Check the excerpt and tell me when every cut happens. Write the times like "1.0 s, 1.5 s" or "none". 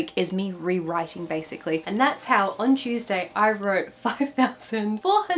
1.8 s